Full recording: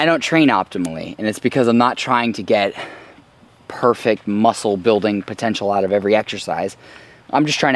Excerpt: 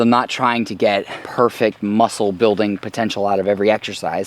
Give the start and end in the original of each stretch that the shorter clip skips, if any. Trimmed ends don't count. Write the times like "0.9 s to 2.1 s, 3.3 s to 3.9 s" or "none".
2.9 s to 3.6 s